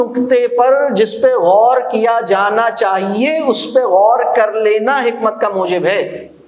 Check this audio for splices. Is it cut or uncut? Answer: uncut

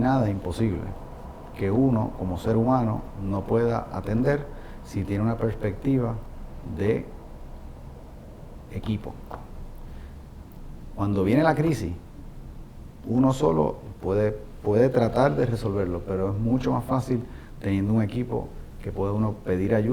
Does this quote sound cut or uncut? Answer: uncut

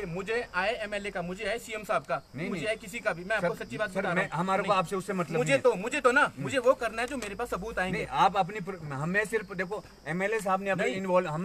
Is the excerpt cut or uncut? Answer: uncut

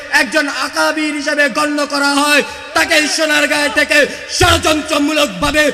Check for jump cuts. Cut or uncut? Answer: uncut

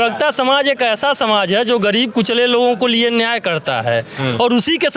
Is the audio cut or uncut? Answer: uncut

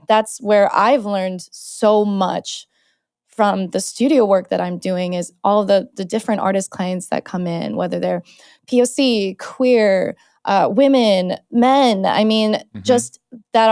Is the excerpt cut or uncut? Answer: uncut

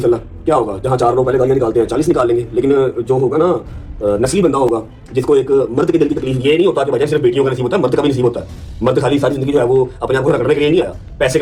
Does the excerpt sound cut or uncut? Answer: uncut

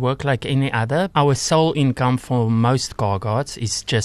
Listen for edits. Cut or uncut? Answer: cut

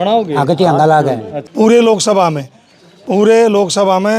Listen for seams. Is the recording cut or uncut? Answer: cut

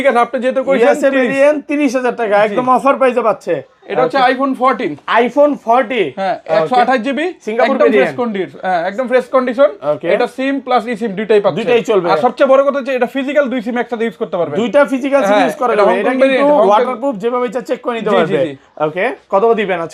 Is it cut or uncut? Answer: uncut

